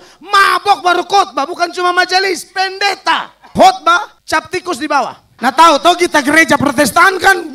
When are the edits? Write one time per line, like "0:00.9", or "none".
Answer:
0:03.5
0:04.2
0:05.2